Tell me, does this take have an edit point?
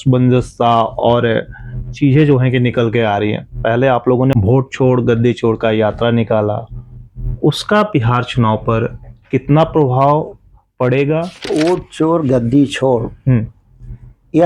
yes; 2 cuts; at 4.3 s, 11.5 s

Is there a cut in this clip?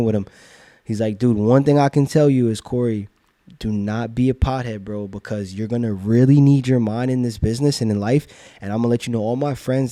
no; 0 cuts

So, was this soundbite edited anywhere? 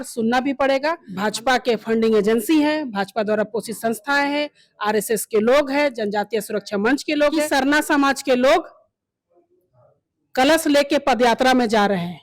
yes; 2 cuts; at 1.1 s, 7.5 s

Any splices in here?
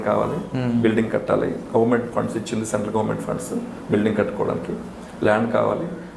no; 0 cuts

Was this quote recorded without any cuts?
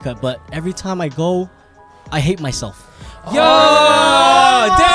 yes; 0 cuts

